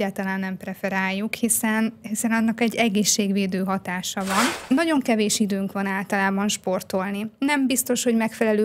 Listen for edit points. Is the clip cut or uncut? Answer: cut